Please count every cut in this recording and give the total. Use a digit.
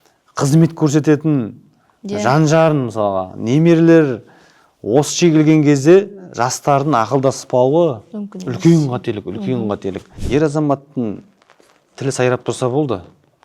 1